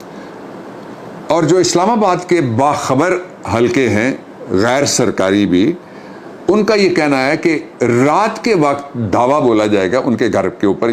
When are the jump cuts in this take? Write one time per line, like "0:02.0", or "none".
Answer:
none